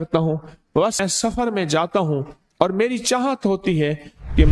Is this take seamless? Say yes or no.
no